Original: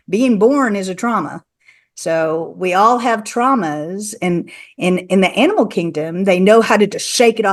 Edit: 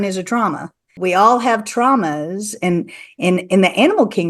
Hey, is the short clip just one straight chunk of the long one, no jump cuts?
no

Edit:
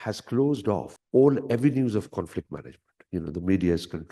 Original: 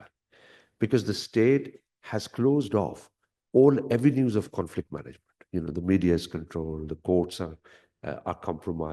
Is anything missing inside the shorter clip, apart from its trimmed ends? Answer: yes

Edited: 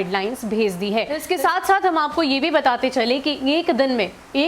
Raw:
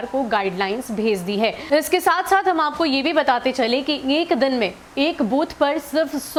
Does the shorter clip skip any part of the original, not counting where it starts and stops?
yes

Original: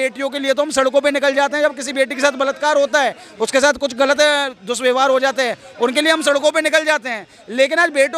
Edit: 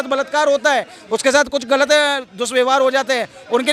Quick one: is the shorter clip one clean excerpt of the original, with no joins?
yes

